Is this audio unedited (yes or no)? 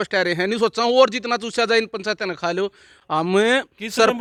yes